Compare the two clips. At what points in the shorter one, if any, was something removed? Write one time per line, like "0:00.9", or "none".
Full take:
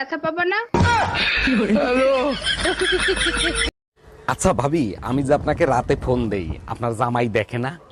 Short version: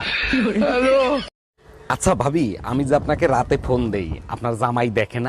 0:01.3